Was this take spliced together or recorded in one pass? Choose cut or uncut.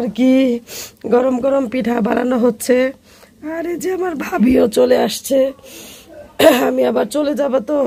uncut